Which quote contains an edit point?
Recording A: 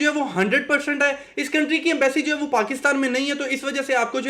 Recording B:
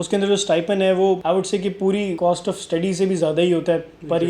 B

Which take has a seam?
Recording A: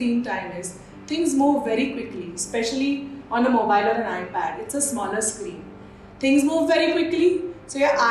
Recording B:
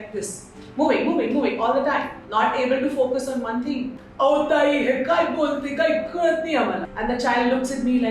B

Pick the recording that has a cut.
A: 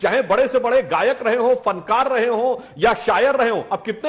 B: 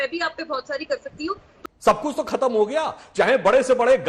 B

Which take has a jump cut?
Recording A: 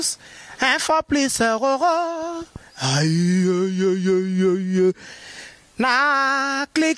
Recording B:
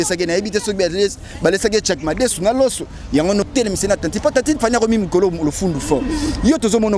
B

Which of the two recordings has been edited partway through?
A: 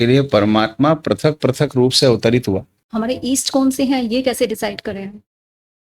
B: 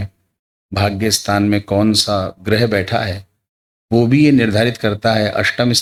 A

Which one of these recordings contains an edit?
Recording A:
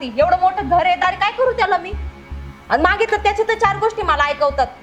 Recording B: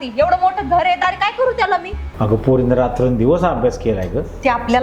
B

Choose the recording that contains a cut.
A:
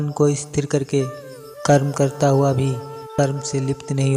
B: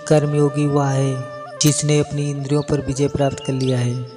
A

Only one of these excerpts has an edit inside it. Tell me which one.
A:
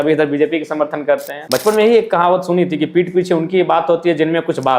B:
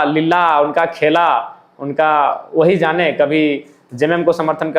A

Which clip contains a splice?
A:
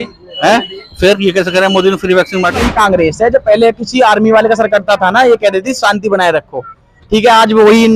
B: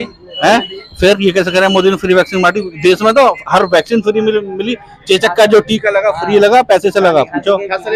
A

